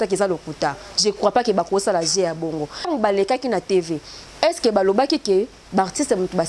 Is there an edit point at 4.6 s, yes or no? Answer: no